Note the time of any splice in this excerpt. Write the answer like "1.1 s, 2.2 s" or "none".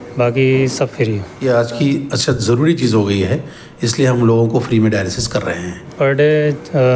1.3 s, 5.9 s